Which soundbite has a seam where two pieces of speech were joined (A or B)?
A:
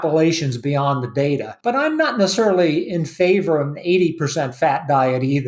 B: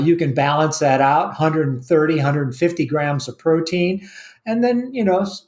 A